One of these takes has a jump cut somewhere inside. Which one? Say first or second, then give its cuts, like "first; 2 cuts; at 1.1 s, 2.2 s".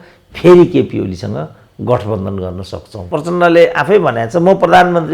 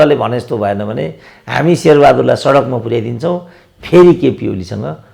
first; 1 cut; at 3.0 s